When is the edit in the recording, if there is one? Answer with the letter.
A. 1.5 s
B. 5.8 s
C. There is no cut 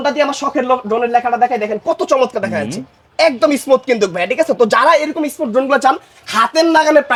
C